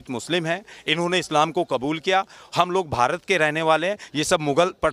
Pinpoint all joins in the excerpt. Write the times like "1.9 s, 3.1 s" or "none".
none